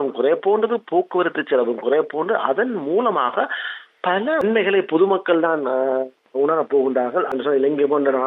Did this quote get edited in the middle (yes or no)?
yes